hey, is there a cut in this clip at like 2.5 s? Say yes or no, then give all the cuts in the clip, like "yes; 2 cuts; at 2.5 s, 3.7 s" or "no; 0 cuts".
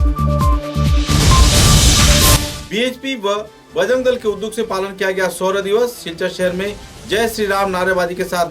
yes; 1 cut; at 2.5 s